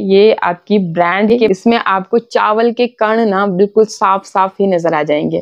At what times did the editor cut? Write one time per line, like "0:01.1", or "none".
0:01.4